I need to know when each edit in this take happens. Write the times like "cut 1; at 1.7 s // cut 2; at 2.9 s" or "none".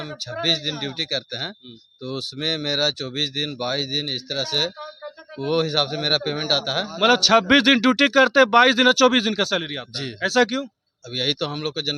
none